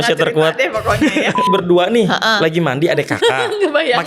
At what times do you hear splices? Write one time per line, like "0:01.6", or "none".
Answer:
0:01.5